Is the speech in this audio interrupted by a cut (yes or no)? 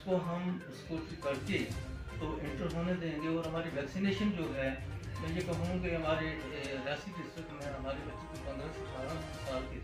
no